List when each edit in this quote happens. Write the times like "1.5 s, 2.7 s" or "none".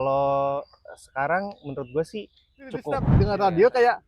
3.1 s